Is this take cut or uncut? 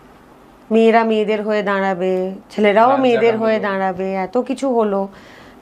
uncut